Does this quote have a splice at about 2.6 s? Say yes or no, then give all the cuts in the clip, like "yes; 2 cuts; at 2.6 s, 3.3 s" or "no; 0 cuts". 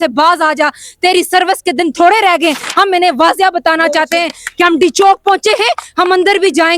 yes; 1 cut; at 2.6 s